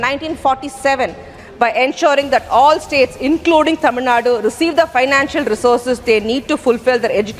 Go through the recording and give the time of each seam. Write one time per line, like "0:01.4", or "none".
0:01.4